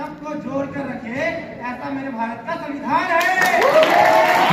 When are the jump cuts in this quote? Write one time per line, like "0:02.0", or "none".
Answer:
none